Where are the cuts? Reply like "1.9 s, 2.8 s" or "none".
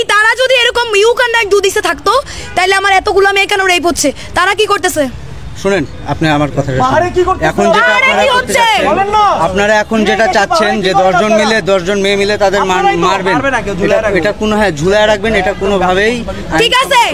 none